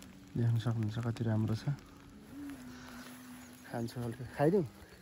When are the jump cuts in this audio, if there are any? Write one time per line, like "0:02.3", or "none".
none